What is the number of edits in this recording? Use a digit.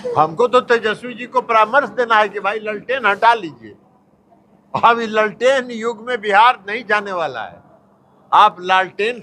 0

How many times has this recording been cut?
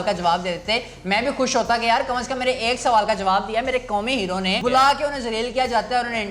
1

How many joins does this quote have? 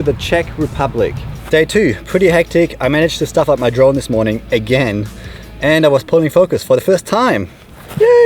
1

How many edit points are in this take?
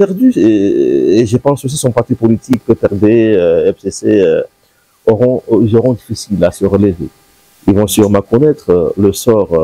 0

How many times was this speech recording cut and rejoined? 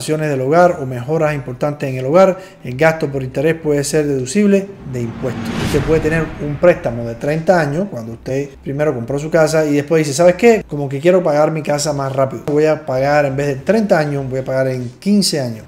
2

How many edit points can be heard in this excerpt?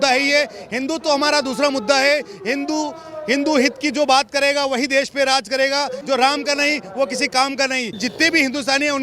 2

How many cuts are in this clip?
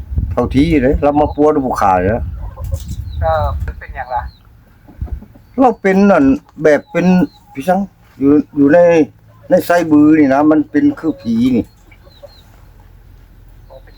1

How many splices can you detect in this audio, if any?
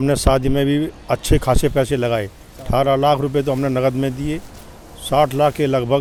0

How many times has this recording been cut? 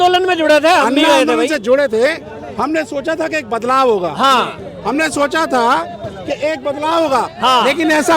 0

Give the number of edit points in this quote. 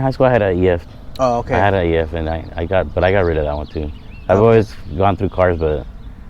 0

